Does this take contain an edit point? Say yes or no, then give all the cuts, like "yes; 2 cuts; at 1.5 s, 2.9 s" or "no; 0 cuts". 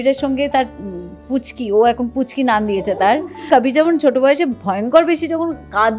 yes; 1 cut; at 3.4 s